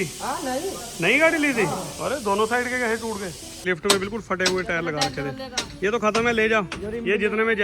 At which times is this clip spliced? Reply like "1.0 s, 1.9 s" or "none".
3.6 s